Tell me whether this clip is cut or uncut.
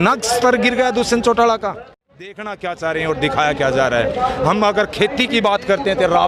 cut